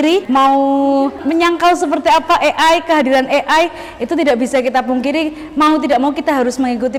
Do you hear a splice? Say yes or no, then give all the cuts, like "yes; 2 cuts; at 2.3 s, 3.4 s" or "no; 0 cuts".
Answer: no; 0 cuts